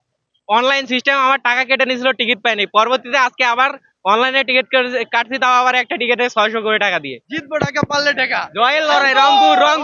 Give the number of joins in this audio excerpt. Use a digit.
1